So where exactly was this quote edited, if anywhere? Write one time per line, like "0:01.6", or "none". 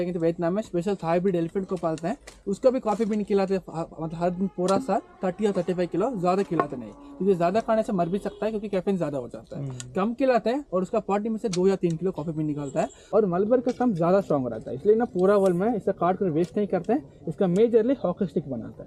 0:13.0